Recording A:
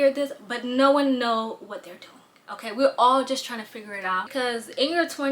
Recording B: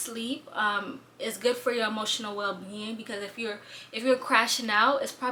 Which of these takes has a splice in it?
A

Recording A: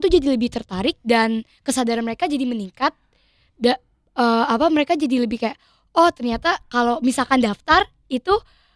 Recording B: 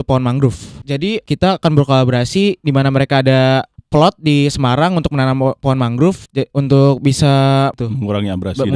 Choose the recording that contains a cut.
B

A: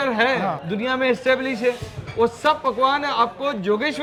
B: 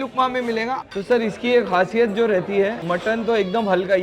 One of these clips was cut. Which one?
B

